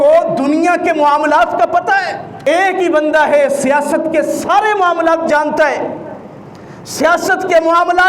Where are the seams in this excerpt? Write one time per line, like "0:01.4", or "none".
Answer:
0:02.2